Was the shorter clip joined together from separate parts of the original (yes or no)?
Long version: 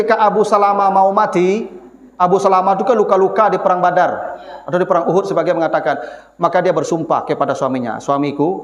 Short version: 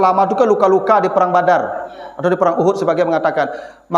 no